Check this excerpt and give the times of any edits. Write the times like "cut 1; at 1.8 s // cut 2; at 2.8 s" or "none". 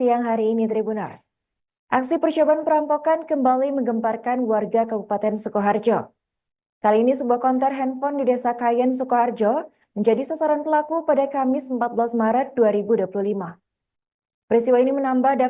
cut 1; at 4.2 s

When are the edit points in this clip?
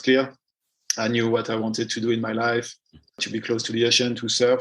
cut 1; at 3.0 s

